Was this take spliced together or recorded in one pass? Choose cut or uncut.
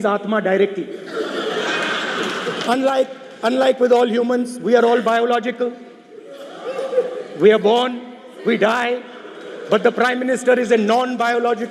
uncut